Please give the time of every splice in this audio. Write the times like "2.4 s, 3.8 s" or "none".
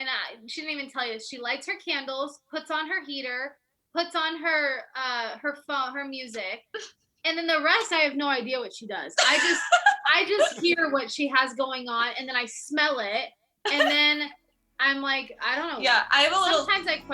none